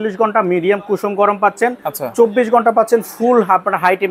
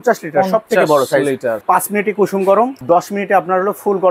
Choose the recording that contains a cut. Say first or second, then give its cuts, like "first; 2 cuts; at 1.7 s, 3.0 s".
second; 2 cuts; at 1.6 s, 2.8 s